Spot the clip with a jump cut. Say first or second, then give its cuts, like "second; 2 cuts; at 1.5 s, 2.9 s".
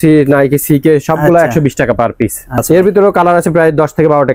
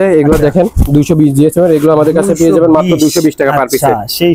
first; 1 cut; at 2.6 s